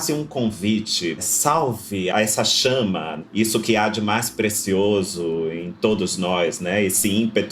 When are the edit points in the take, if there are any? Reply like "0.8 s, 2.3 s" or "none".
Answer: 1.2 s, 2.1 s